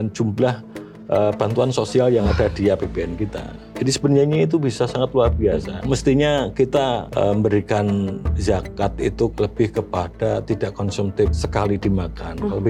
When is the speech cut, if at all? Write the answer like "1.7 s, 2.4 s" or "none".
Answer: 5.7 s, 7.1 s, 8.3 s, 9.3 s, 11.4 s